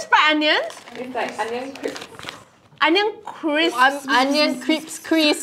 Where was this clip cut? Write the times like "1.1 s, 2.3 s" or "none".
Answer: none